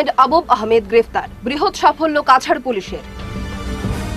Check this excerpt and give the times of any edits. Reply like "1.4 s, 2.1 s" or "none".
none